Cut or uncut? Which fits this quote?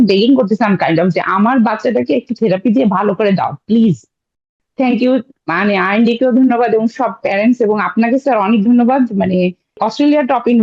cut